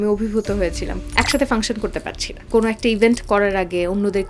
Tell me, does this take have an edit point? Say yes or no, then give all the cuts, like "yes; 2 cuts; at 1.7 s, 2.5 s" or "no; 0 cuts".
yes; 2 cuts; at 0.9 s, 2.4 s